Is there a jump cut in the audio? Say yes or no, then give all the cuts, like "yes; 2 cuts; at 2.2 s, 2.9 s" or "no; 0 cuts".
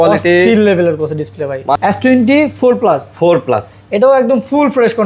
yes; 1 cut; at 1.8 s